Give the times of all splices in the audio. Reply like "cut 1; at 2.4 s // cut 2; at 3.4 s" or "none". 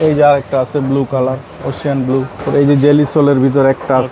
cut 1; at 2.4 s

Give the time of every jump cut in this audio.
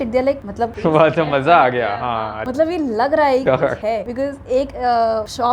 none

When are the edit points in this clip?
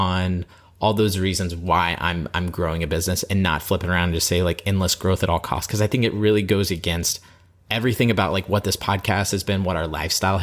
none

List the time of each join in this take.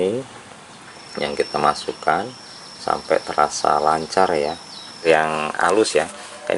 cut 1; at 5.0 s

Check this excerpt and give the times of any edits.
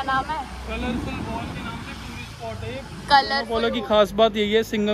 cut 1; at 3.5 s

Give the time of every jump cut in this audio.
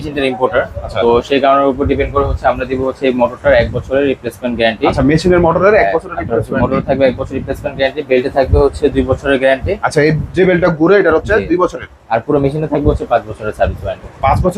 none

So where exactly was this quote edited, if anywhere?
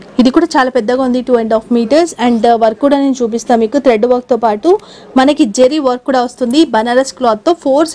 none

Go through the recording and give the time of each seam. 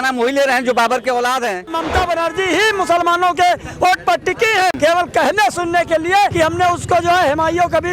cut 1; at 1.8 s // cut 2; at 4.8 s // cut 3; at 6.3 s

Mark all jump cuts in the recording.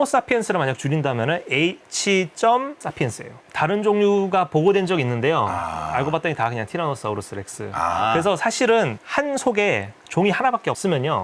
cut 1; at 3.3 s

